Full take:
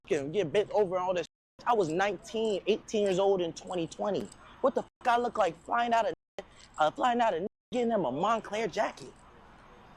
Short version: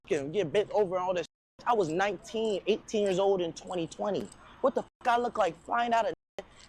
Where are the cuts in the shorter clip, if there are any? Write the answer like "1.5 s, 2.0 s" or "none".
none